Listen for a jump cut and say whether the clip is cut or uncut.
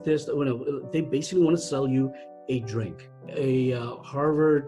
cut